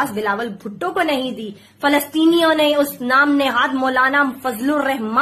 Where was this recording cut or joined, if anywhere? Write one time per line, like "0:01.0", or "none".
none